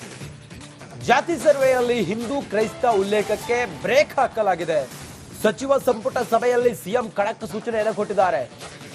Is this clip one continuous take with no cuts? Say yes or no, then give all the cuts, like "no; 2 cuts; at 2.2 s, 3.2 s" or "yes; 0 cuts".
no; 1 cut; at 0.9 s